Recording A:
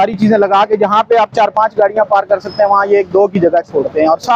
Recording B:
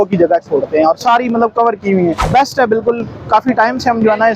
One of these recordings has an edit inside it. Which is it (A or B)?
B